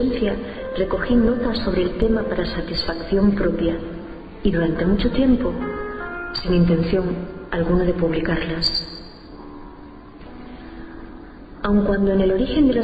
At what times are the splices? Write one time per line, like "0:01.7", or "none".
0:09.4